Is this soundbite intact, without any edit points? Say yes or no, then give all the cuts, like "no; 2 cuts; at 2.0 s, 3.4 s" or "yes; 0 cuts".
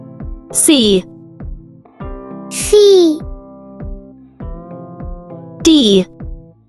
yes; 0 cuts